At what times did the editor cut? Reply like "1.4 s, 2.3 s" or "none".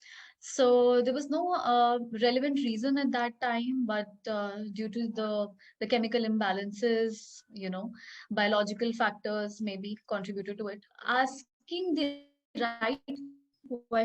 10.9 s

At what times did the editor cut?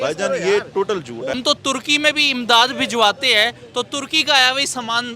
1.4 s

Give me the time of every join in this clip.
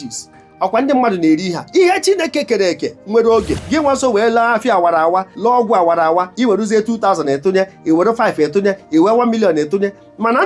3.6 s, 5.3 s, 6.3 s

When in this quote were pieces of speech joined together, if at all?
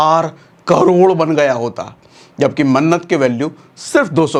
none

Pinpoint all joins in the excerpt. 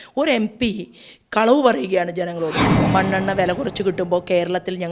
2.7 s

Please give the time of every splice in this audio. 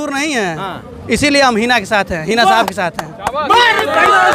none

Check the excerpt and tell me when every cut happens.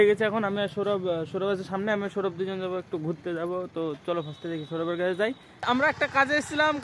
5.7 s

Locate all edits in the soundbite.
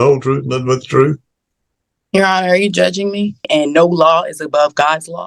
3.4 s

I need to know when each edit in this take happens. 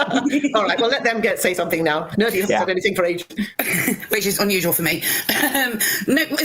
none

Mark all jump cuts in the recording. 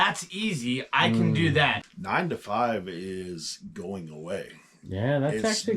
1.9 s

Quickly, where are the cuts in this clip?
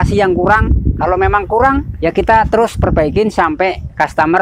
none

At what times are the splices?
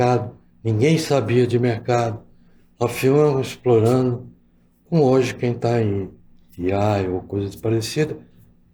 none

